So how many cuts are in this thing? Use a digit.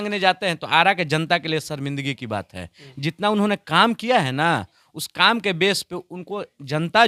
0